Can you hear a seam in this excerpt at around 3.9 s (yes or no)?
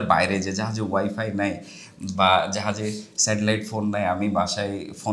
no